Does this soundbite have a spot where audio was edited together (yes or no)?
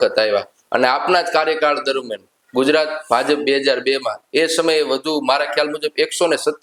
no